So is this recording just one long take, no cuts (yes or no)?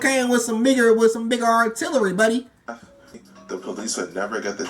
no